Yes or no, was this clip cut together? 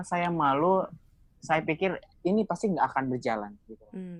no